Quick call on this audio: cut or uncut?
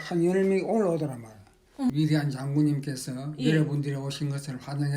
cut